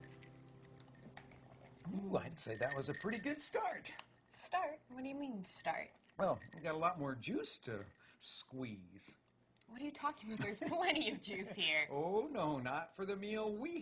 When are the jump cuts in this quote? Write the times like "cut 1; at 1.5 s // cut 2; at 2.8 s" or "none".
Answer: cut 1; at 12.9 s